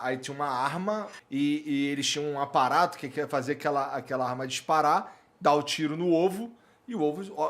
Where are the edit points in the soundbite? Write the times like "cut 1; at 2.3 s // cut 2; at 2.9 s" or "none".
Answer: cut 1; at 1.2 s